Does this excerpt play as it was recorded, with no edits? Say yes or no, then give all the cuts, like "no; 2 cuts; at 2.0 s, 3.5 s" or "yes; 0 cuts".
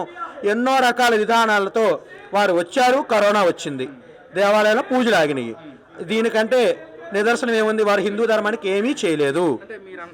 yes; 0 cuts